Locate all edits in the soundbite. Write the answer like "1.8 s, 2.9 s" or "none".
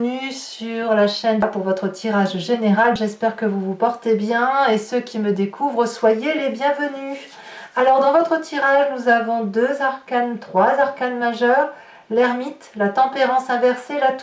1.4 s, 3.0 s